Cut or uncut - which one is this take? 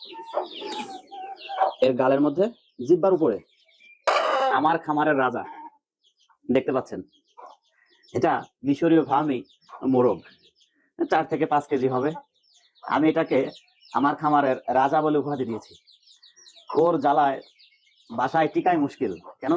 cut